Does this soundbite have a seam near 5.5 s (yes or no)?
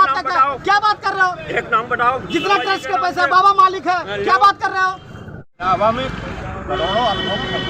yes